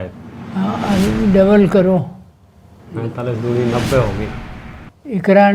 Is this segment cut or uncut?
uncut